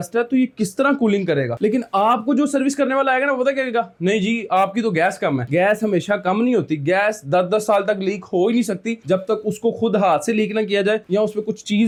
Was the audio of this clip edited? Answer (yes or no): no